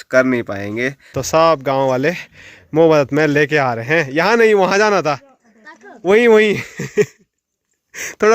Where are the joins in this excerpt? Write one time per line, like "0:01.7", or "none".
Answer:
0:01.1